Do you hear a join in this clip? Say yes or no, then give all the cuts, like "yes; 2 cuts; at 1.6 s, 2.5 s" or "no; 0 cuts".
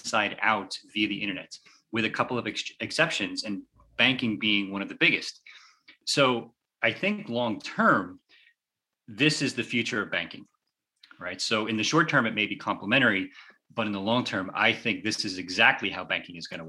yes; 1 cut; at 6.0 s